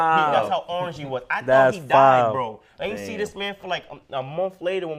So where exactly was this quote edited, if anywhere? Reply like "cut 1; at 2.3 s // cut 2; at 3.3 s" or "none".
none